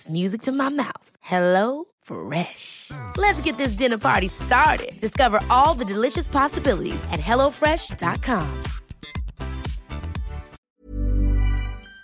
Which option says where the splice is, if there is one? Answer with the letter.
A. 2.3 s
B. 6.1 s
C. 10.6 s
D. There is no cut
C